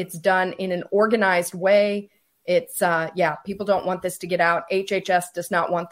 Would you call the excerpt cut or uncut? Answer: uncut